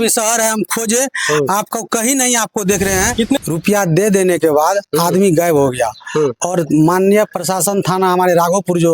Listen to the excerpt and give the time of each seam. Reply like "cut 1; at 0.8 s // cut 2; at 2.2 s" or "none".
cut 1; at 3.4 s